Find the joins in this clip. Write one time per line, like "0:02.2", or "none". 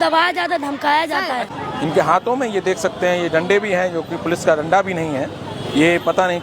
0:01.5